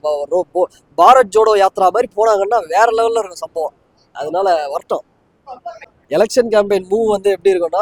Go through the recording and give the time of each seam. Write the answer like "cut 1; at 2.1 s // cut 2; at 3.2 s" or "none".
none